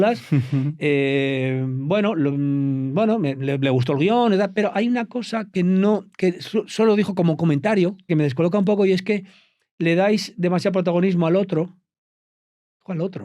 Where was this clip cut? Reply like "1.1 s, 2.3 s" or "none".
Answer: 8.1 s